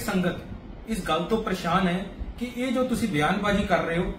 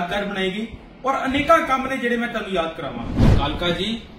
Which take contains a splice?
second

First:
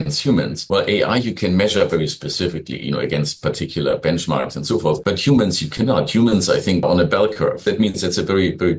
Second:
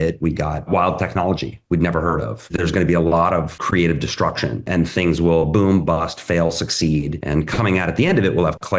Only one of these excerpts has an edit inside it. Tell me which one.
second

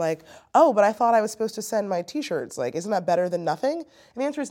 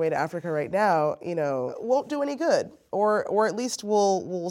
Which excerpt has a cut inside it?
second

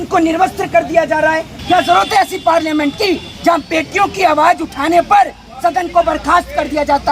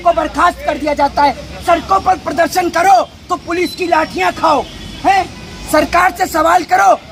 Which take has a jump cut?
first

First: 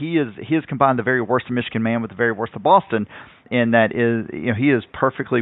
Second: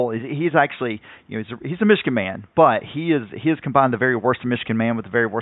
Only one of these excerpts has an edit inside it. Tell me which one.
first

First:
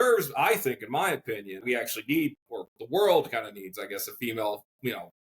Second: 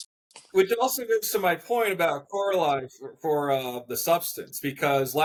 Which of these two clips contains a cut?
first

